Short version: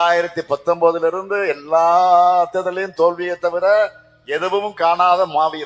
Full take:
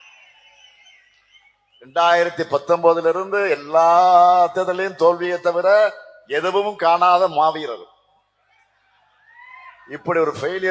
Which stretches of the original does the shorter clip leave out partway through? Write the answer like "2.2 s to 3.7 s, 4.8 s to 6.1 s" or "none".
none